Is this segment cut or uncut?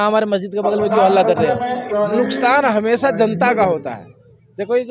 cut